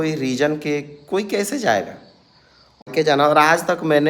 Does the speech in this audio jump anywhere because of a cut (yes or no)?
yes